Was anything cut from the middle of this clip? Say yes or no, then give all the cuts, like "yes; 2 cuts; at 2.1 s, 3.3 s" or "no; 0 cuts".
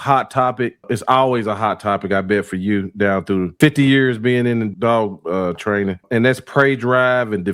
yes; 4 cuts; at 0.8 s, 3.5 s, 4.7 s, 6.0 s